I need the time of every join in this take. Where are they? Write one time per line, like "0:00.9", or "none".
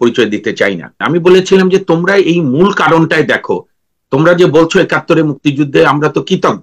0:00.9